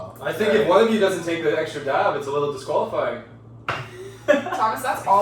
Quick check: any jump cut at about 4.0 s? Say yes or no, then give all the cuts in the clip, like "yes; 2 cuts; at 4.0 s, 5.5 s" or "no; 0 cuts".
no; 0 cuts